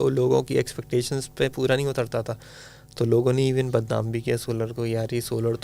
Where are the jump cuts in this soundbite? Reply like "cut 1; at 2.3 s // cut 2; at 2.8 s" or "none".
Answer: none